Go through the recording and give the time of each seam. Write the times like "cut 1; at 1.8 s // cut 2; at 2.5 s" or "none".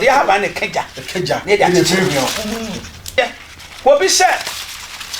cut 1; at 3.1 s